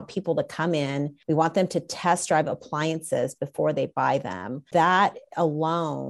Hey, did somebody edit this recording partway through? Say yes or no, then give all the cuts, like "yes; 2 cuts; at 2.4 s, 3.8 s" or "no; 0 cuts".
yes; 2 cuts; at 1.1 s, 4.6 s